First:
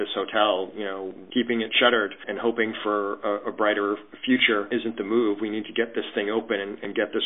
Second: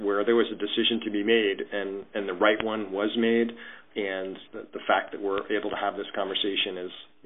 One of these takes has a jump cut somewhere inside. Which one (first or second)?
first